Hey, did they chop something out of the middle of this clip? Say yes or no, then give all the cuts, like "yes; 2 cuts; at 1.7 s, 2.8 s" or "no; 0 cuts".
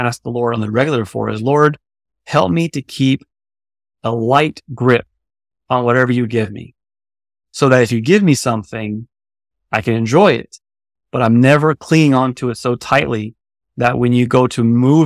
no; 0 cuts